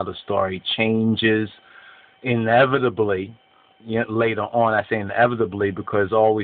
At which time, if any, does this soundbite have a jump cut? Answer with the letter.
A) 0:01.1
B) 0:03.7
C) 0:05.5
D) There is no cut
B